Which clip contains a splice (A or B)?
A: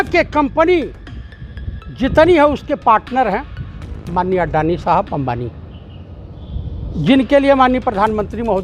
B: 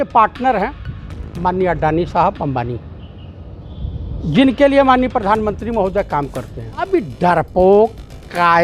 B